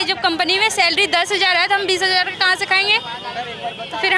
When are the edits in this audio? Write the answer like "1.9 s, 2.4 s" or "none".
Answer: none